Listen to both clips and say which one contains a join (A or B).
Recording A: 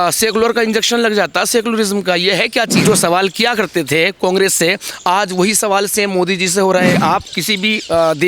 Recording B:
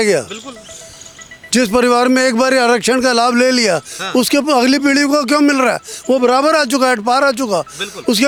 A